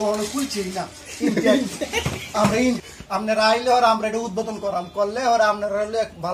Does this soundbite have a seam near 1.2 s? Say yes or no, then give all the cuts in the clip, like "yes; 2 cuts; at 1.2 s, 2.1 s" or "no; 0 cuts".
no; 1 cut; at 2.8 s